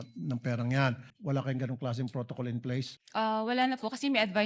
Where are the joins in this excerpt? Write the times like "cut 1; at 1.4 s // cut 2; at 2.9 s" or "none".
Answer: cut 1; at 1.1 s // cut 2; at 3.0 s